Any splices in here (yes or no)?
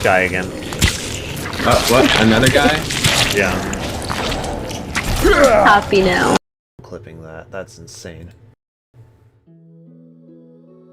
no